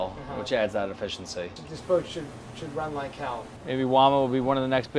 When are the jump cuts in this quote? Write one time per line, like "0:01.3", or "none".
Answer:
0:01.6
0:03.5